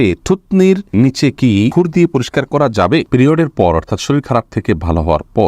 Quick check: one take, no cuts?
no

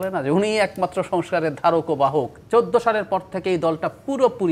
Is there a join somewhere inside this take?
yes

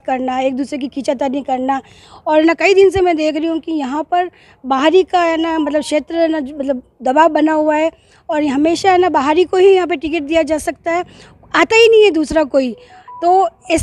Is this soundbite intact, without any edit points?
yes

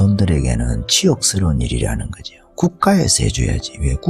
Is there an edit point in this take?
no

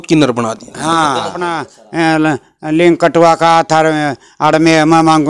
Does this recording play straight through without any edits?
no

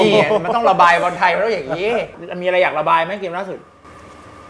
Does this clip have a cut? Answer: yes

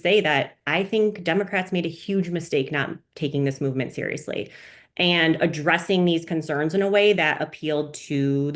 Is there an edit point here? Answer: no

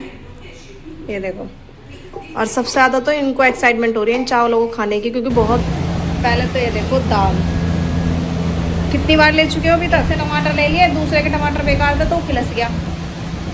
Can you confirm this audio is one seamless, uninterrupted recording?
no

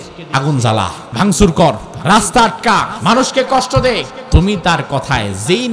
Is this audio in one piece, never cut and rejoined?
no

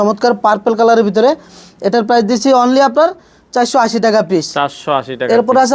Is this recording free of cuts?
yes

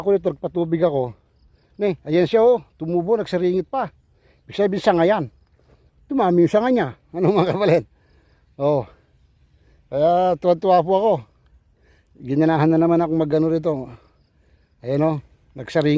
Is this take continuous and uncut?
yes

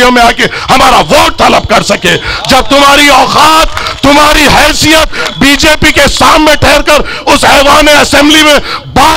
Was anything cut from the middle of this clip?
no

